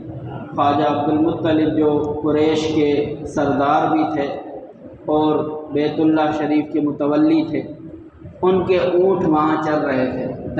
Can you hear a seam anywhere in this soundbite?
no; 0 cuts

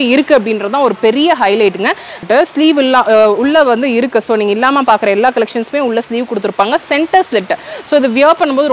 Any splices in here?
yes; 1 cut; at 2.2 s

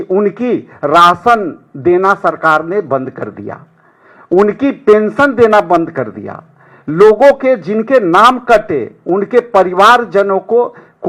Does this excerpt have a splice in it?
no; 0 cuts

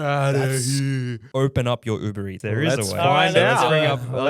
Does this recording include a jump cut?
yes; 2 cuts; at 1.2 s, 2.4 s

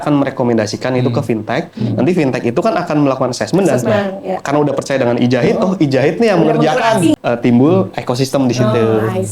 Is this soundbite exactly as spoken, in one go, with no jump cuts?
no; 1 cut; at 7.1 s

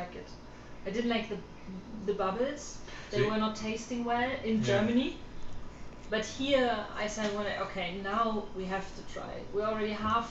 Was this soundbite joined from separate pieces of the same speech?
no; 0 cuts

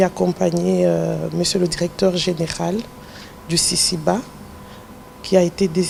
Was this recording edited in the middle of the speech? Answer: no; 0 cuts

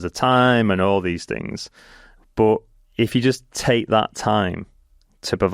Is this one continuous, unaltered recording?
no; 1 cut; at 2.8 s

